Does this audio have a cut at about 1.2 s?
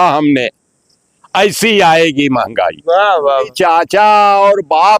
no; 1 cut; at 3.3 s

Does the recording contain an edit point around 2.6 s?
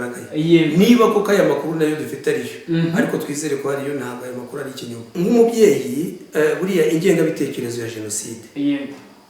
no; 1 cut; at 5.0 s

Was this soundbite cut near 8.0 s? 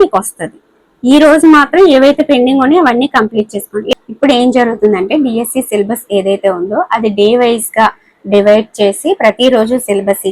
no; 1 cut; at 3.9 s

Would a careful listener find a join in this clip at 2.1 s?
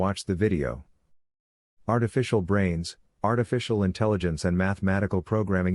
no; 1 cut; at 4.2 s

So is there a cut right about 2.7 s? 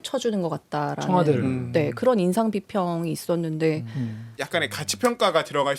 no; 1 cut; at 4.3 s

